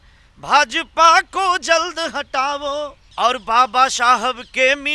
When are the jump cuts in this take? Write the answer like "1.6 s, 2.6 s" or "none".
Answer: 3.0 s